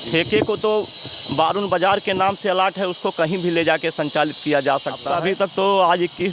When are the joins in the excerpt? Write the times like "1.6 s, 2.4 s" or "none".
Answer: 5.1 s